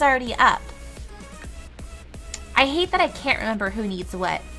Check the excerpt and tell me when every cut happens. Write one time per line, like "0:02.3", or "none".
0:01.1